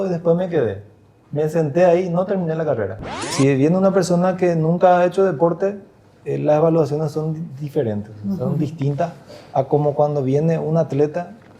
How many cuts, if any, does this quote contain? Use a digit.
1